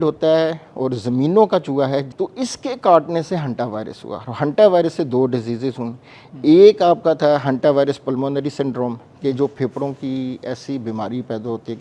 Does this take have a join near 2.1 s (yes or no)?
yes